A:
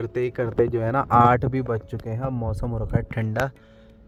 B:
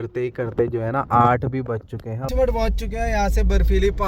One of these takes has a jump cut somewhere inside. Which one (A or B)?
B